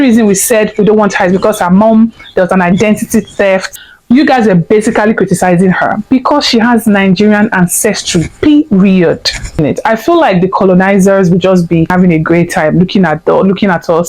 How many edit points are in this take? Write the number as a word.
three